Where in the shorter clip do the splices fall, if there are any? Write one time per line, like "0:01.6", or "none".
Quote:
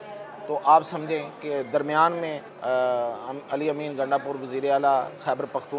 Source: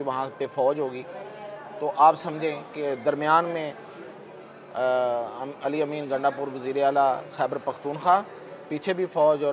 0:02.5